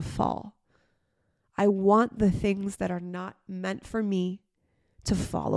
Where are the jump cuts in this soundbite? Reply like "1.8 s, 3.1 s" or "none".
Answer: none